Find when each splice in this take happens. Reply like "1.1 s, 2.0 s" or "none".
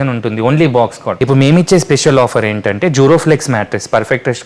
1.1 s